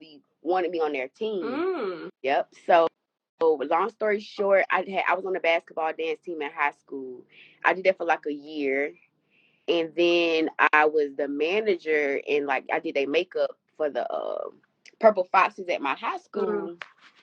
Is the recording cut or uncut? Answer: uncut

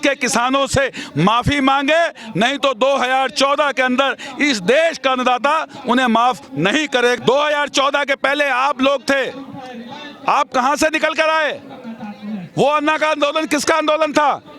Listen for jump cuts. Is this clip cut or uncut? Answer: cut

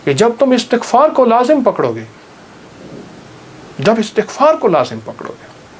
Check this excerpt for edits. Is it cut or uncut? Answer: uncut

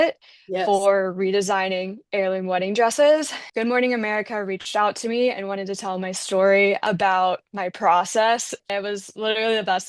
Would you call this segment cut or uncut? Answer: cut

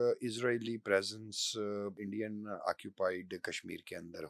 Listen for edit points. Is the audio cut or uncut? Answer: cut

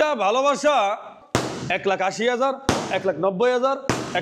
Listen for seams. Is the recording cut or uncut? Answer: cut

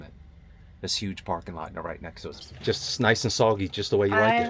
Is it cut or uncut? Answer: cut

